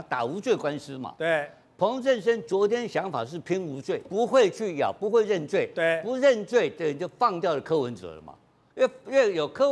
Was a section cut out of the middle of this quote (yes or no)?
yes